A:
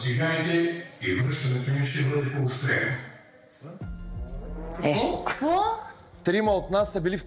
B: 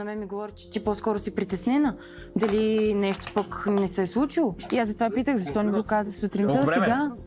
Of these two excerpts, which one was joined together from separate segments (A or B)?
B